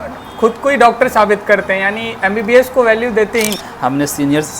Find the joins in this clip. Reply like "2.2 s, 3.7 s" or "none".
3.7 s